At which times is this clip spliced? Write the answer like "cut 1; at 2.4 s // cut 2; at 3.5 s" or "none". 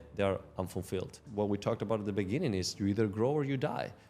cut 1; at 1.2 s